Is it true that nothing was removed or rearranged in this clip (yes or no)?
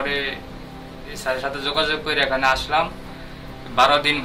yes